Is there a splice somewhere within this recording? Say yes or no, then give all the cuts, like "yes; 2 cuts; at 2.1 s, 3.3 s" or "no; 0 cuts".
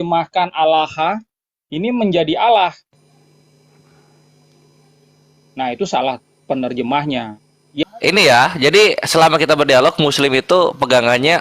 yes; 1 cut; at 7.8 s